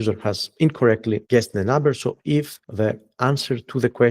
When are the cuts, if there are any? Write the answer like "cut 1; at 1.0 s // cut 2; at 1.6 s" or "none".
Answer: cut 1; at 1.2 s // cut 2; at 2.6 s

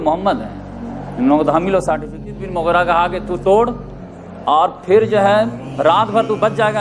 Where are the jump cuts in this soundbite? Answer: cut 1; at 2.4 s

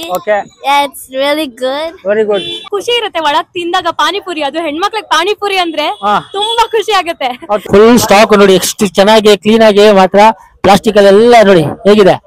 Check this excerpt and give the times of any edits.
cut 1; at 2.7 s // cut 2; at 7.6 s

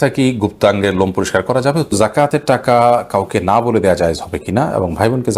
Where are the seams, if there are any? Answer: cut 1; at 1.9 s

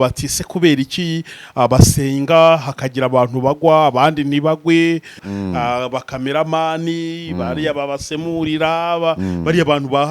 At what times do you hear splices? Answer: cut 1; at 5.2 s

